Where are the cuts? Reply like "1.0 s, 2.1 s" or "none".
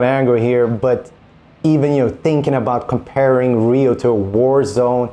none